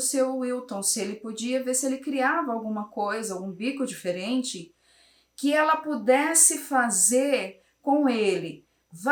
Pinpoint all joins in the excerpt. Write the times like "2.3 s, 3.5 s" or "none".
none